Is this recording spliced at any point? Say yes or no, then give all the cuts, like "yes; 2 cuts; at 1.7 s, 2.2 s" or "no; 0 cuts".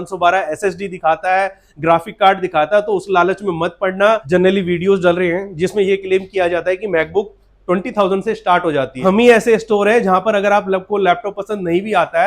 yes; 2 cuts; at 4.2 s, 9.0 s